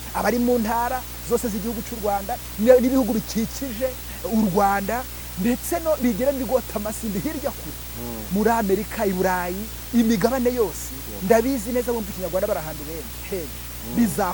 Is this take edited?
no; 0 cuts

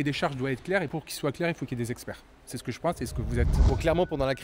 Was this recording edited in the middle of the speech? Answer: no; 0 cuts

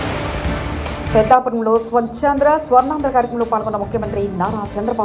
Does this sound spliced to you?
yes; 1 cut; at 1.1 s

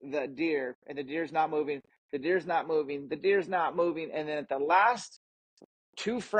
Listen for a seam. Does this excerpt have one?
no; 0 cuts

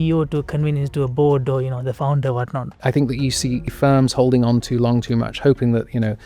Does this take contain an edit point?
yes; 2 cuts; at 2.7 s, 3.7 s

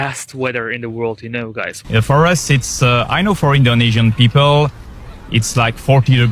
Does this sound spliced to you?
yes; 1 cut; at 1.8 s

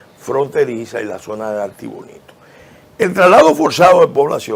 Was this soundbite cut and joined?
no; 0 cuts

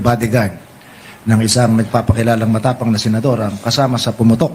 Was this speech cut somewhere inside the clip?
no; 0 cuts

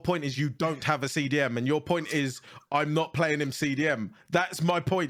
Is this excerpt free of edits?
yes; 0 cuts

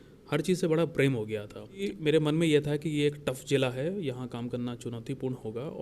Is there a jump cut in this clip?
yes; 1 cut; at 1.9 s

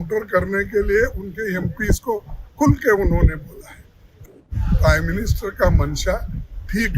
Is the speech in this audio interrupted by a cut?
yes; 1 cut; at 4.2 s

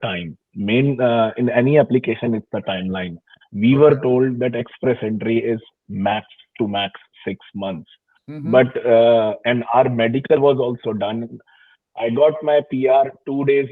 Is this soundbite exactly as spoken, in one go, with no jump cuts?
yes; 0 cuts

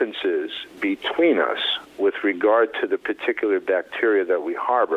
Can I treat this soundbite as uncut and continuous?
yes; 0 cuts

